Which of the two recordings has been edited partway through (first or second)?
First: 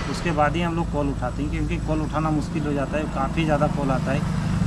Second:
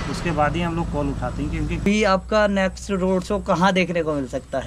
second